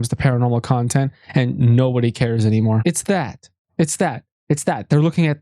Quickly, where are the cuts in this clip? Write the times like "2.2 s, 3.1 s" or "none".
2.8 s